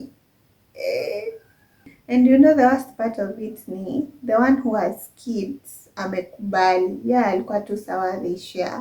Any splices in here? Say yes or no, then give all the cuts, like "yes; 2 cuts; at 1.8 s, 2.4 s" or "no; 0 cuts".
yes; 1 cut; at 1.9 s